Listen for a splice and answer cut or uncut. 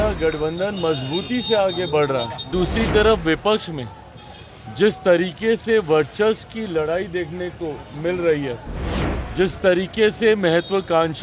cut